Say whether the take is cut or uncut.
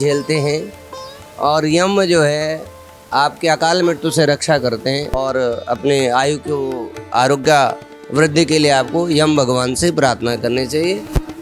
uncut